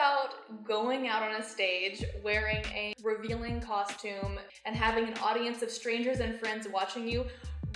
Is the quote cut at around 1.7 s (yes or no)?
no